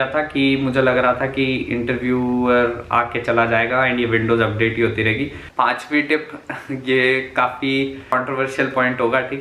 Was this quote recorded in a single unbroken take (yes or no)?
no